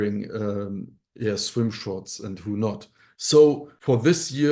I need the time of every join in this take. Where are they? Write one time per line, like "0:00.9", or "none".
0:03.1